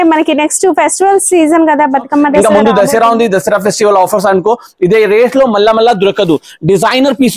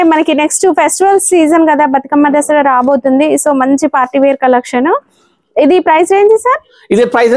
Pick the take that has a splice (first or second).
first